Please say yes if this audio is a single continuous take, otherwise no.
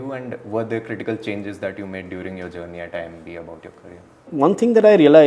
no